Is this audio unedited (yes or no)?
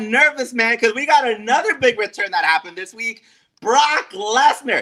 yes